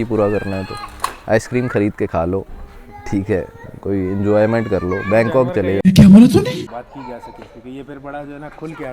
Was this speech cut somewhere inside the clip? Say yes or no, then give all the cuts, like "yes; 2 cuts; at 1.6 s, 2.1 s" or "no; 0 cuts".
yes; 1 cut; at 6.7 s